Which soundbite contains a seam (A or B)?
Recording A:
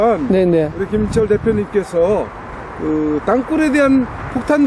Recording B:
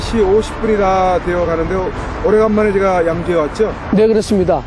A